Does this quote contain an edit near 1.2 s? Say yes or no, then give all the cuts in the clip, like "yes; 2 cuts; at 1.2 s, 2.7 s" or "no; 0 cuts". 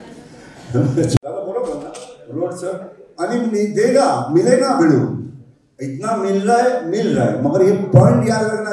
yes; 1 cut; at 1.2 s